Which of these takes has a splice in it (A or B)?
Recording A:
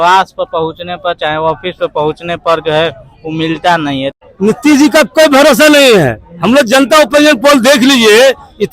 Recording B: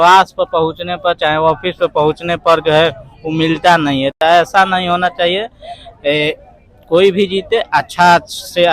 A